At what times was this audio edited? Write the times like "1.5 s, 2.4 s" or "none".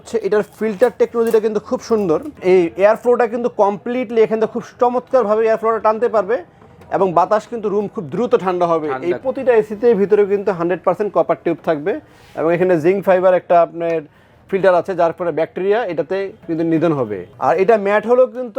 2.4 s, 9.2 s, 17.2 s